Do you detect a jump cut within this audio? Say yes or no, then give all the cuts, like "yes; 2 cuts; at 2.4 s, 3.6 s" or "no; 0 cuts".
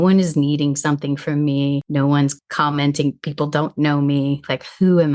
yes; 1 cut; at 2.1 s